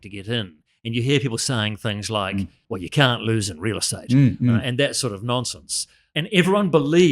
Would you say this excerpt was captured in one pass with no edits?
no; 2 cuts; at 2.6 s, 6.0 s

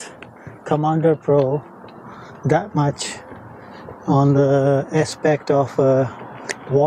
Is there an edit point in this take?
no; 0 cuts

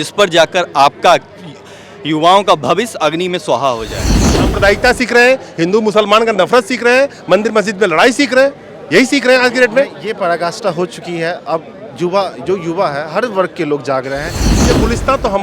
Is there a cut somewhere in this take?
yes; 2 cuts; at 4.3 s, 14.6 s

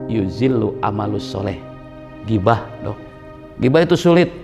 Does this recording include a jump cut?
yes; 1 cut; at 3.4 s

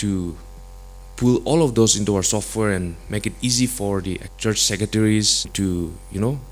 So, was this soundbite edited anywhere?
yes; 2 cuts; at 4.3 s, 5.5 s

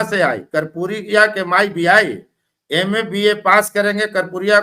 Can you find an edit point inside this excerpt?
no; 0 cuts

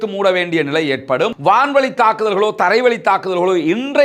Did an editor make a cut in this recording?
yes; 1 cut; at 1.4 s

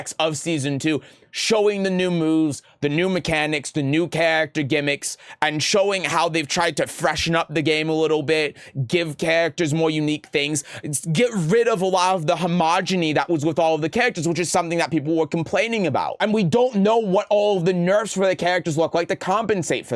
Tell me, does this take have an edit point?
yes; 1 cut; at 16.1 s

